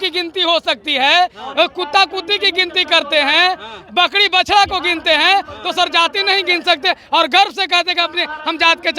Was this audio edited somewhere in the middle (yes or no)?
no